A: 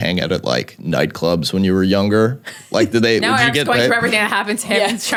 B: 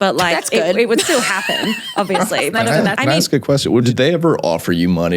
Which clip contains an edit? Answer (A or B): B